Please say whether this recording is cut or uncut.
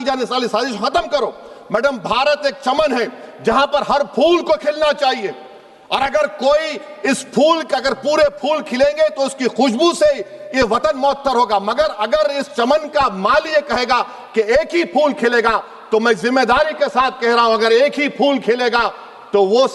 uncut